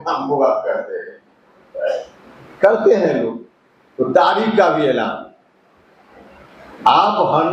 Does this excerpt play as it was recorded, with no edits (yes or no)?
yes